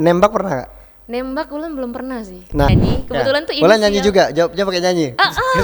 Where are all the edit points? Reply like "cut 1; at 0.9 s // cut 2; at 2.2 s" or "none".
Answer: cut 1; at 2.7 s